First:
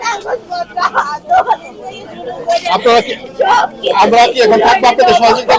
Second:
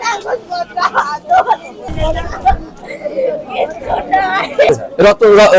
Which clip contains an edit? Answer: second; 2 cuts; at 1.8 s, 4.7 s

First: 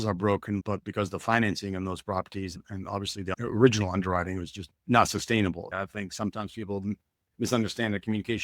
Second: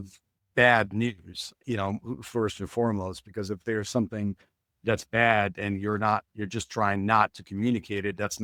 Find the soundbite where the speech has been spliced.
first; 1 cut; at 5.7 s

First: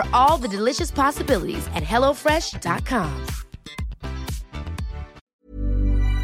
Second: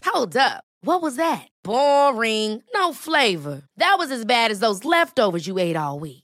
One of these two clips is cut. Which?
first; 1 cut; at 5.2 s

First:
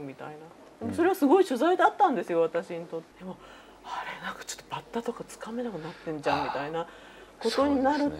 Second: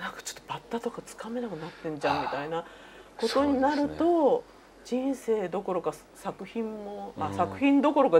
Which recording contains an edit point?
first; 1 cut; at 3.1 s

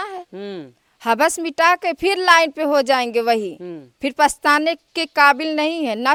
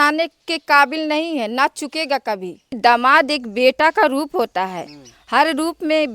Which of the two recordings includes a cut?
second; 1 cut; at 2.8 s

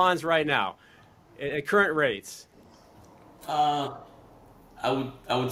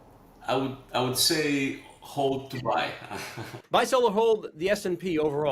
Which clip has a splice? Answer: second; 1 cut; at 3.6 s

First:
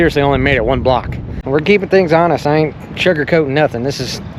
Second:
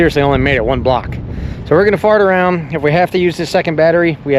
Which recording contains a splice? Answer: first; 1 cut; at 1.4 s

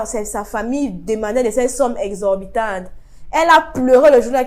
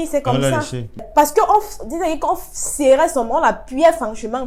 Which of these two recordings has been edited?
second; 1 cut; at 1.1 s

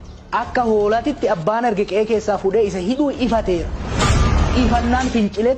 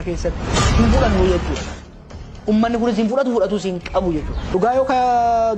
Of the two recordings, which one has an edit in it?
second; 1 cut; at 4.5 s

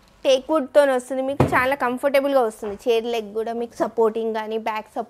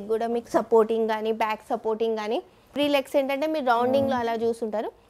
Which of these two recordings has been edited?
second; 1 cut; at 2.8 s

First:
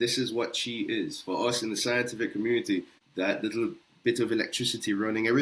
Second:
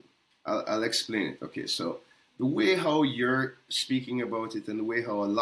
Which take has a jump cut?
first; 1 cut; at 3.0 s

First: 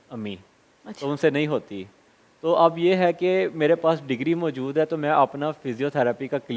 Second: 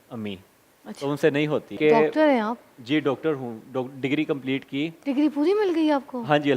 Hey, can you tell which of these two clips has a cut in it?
second; 1 cut; at 1.8 s

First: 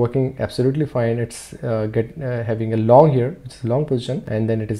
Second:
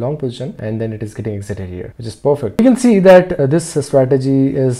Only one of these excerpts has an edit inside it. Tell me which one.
second; 2 cuts; at 2.5 s, 3.4 s

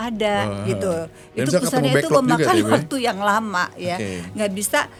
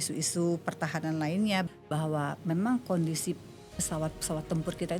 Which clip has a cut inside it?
second; 1 cut; at 1.7 s

